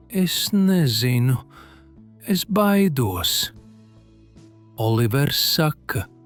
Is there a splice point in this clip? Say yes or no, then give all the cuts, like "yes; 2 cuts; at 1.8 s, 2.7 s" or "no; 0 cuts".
no; 0 cuts